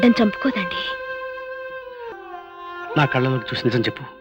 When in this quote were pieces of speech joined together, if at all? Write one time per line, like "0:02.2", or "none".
0:02.1